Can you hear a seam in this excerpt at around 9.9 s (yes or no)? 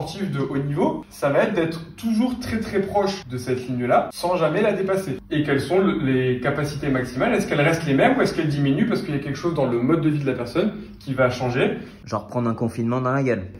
no